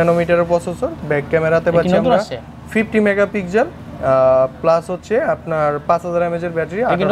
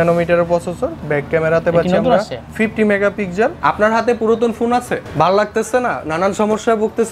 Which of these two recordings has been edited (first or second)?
second